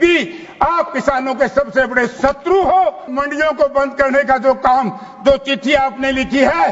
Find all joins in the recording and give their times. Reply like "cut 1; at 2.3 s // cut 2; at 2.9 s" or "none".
cut 1; at 3.1 s